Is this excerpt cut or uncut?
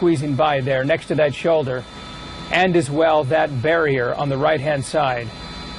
cut